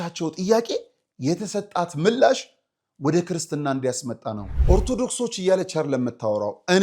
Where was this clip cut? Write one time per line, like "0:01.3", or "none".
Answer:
0:04.5